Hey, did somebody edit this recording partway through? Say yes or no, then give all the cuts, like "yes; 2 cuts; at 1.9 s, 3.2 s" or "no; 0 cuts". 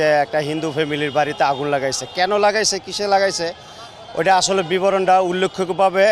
no; 0 cuts